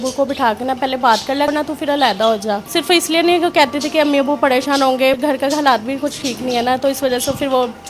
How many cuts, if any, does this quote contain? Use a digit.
3